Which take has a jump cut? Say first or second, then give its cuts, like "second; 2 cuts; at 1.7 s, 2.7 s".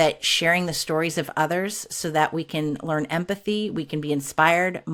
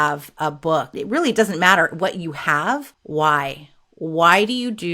second; 2 cuts; at 1.0 s, 3.0 s